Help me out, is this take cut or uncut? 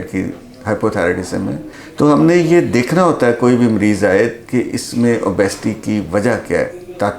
uncut